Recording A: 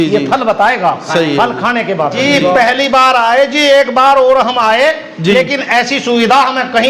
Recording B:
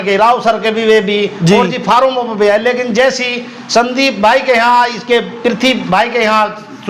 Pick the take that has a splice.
A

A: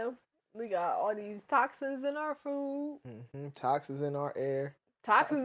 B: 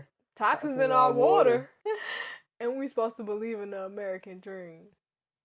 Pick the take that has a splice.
B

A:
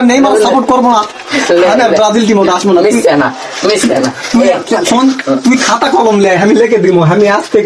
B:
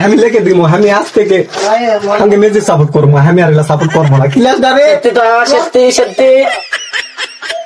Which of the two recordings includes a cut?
B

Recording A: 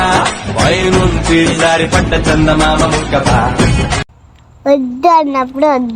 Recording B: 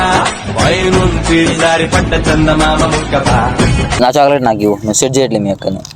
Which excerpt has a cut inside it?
B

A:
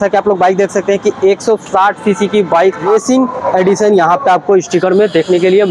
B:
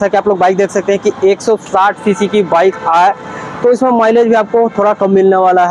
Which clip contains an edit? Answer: A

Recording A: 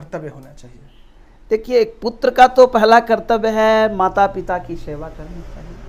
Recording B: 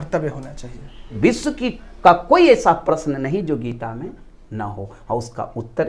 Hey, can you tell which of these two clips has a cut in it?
B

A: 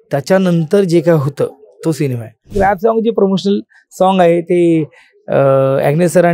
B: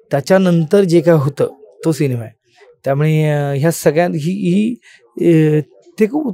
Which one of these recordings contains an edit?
A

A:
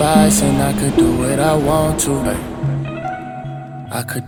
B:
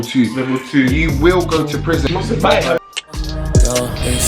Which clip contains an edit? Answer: B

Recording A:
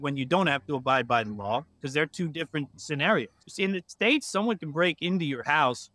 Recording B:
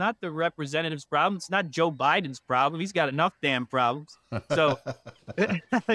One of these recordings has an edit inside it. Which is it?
A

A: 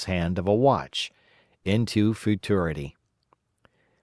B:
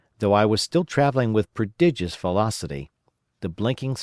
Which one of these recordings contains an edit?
B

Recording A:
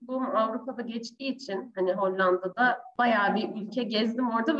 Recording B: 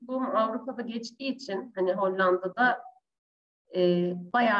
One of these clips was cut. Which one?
A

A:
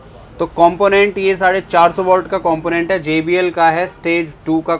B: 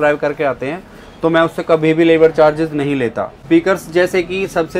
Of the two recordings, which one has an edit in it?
B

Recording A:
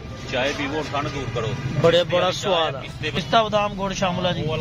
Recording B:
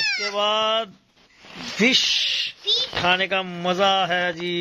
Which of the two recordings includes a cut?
A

